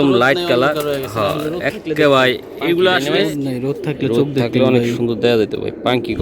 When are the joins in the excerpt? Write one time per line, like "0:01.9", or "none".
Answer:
0:03.2